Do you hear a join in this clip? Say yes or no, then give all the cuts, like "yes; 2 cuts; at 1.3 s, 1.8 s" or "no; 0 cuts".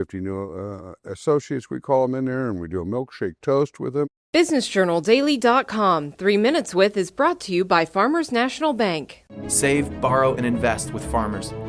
yes; 1 cut; at 4.1 s